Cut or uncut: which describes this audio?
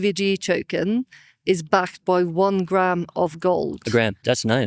uncut